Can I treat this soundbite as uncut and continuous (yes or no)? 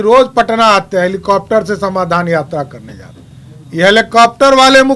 yes